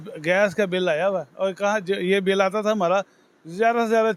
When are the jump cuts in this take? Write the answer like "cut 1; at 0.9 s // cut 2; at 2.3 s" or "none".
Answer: none